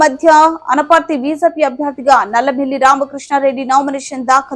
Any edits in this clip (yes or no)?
no